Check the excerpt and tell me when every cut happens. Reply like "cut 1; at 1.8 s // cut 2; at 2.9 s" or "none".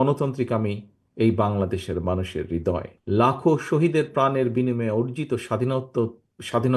cut 1; at 2.9 s